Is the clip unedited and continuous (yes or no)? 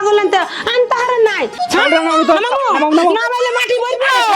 no